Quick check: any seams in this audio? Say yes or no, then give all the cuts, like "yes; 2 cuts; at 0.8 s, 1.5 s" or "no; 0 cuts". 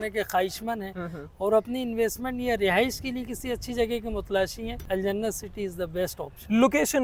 no; 0 cuts